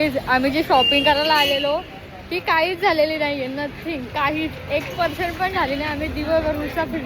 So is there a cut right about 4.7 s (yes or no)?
no